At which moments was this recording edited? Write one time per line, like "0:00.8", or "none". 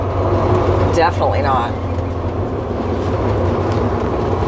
none